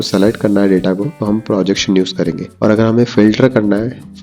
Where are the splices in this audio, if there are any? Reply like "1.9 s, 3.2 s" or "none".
1.1 s, 2.4 s